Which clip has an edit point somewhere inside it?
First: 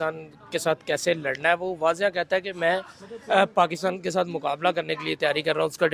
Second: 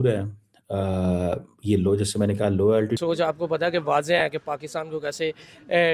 second; 1 cut; at 3.0 s

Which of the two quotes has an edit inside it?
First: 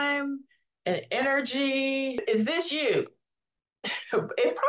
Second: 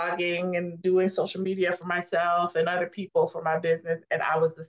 first; 1 cut; at 2.2 s

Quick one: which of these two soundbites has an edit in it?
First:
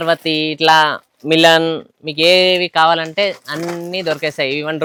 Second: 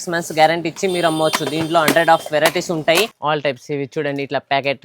second; 1 cut; at 3.1 s

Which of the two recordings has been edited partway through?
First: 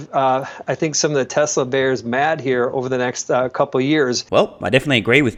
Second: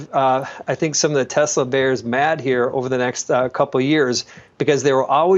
second; 1 cut; at 4.2 s

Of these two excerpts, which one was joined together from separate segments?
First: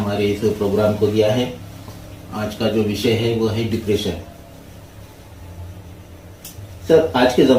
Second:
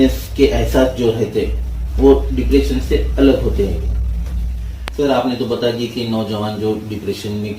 second; 1 cut; at 4.9 s

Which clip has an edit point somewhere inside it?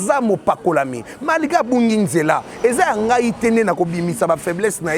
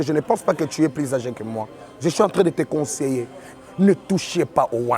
second; 1 cut; at 3.5 s

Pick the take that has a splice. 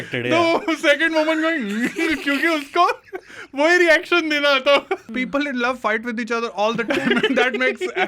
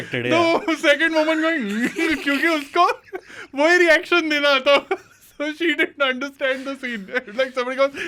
first; 1 cut; at 5.1 s

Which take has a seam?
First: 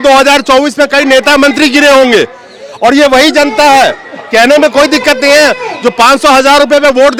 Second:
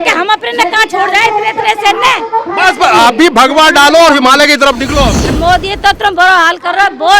second; 1 cut; at 5.3 s

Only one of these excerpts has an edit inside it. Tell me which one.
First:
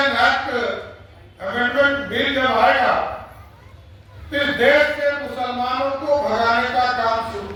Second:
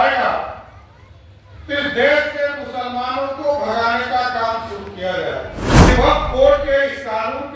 second; 1 cut; at 5.9 s

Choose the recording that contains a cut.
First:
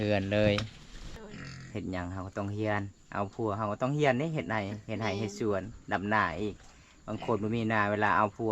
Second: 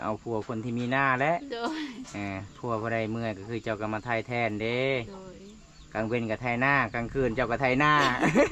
first; 1 cut; at 1.1 s

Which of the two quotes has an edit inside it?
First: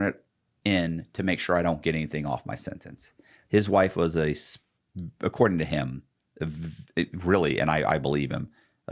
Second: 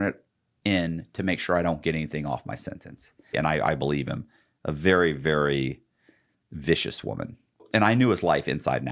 second; 2 cuts; at 3.3 s, 7.6 s

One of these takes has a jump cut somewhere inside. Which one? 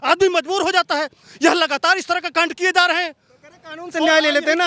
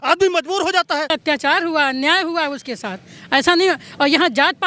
second; 1 cut; at 1.1 s

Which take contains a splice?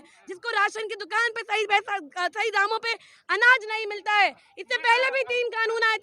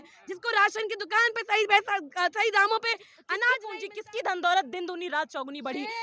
second; 1 cut; at 3.7 s

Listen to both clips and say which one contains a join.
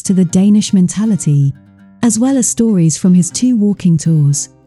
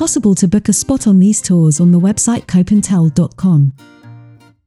second; 1 cut; at 3.8 s

